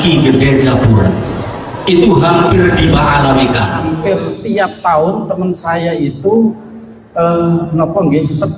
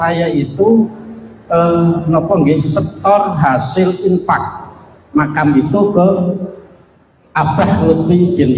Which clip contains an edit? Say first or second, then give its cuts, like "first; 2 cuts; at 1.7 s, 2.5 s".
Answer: first; 1 cut; at 3.9 s